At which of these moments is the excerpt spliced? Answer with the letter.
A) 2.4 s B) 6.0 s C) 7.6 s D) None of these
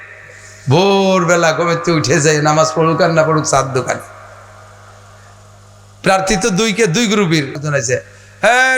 C